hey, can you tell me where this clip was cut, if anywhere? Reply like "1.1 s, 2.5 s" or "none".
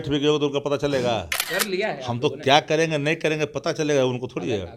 1.4 s